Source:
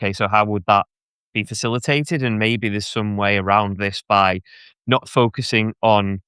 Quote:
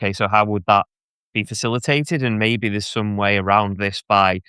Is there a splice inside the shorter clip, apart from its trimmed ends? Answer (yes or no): no